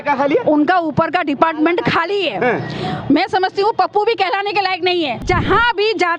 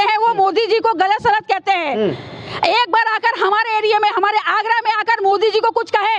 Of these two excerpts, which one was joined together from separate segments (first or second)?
first